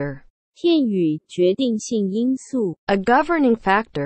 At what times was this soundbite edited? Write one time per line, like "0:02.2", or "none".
0:02.8